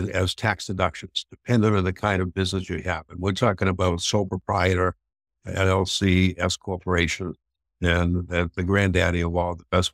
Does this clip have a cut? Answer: no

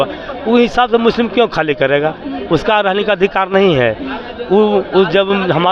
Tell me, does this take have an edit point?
no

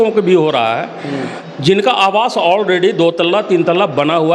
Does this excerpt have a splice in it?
no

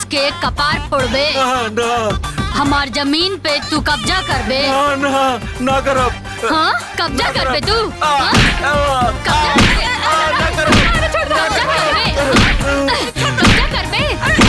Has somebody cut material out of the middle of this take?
no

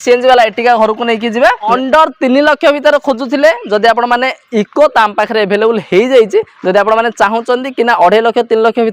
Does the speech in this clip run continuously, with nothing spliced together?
no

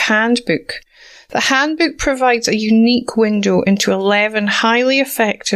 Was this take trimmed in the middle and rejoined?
no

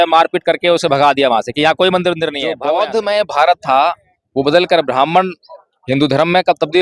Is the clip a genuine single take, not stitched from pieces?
no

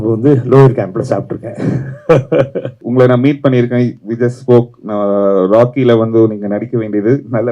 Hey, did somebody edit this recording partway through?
yes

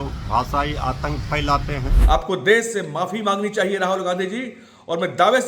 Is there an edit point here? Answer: yes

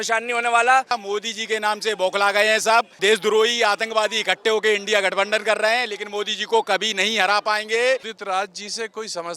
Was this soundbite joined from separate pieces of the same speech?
yes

